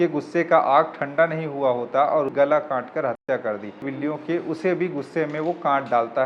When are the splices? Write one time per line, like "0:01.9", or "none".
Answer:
0:02.3
0:03.8